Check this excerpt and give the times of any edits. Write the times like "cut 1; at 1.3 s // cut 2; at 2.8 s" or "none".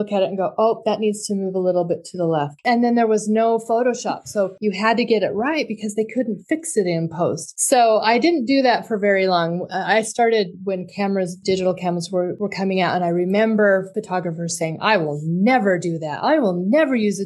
cut 1; at 2.6 s // cut 2; at 4.5 s // cut 3; at 7.5 s // cut 4; at 11.4 s // cut 5; at 12.3 s // cut 6; at 13.9 s